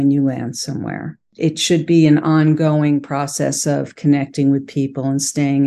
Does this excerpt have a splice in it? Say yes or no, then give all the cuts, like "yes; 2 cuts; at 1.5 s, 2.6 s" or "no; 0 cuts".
yes; 1 cut; at 1.2 s